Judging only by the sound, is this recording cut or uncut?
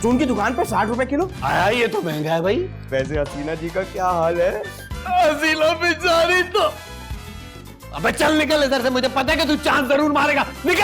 cut